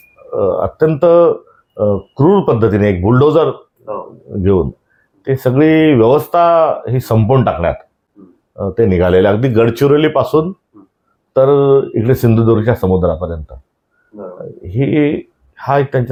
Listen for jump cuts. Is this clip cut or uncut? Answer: uncut